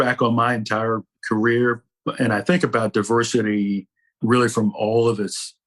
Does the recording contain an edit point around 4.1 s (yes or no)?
no